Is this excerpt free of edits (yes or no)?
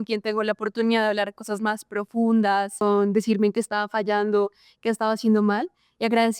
no